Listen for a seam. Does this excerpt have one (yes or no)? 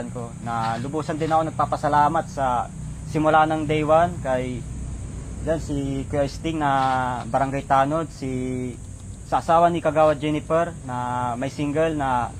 no